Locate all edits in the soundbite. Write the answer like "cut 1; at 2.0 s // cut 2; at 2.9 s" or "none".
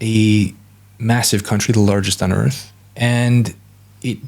none